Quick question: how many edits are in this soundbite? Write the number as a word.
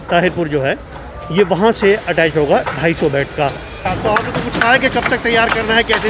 one